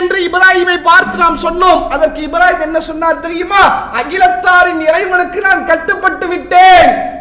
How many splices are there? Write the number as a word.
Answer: zero